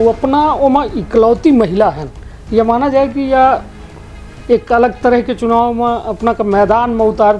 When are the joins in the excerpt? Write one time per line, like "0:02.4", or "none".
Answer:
none